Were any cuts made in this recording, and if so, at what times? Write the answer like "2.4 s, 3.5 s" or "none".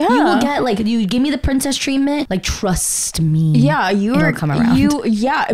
2.3 s